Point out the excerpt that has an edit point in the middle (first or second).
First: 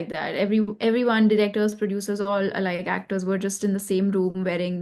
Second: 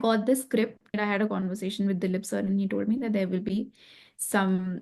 second